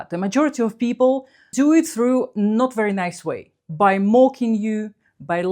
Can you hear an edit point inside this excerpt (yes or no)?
yes